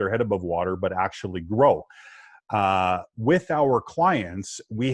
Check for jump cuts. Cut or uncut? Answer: uncut